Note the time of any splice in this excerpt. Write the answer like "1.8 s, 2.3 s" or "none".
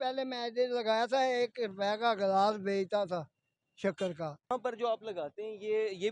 4.5 s